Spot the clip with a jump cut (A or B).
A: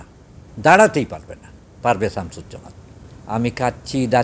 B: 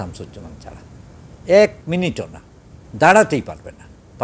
A